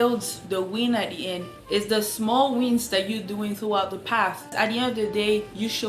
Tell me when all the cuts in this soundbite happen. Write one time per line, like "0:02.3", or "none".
0:04.5